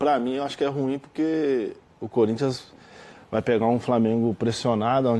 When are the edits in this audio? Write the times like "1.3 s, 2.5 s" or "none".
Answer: none